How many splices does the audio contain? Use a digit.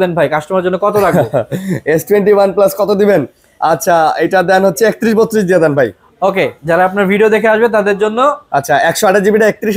0